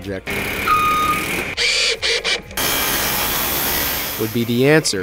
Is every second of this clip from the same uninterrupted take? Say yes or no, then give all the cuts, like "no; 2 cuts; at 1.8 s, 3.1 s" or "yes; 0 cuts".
yes; 0 cuts